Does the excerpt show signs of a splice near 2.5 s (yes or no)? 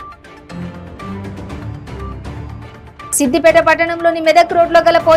no